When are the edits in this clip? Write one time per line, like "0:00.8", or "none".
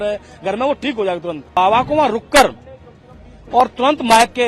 0:01.6